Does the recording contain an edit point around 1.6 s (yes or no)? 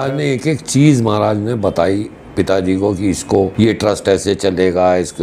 no